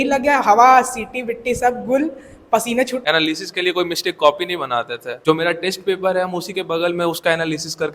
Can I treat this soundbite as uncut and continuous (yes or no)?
no